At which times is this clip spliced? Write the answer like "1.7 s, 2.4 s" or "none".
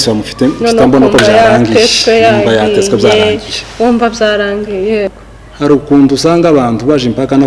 5.1 s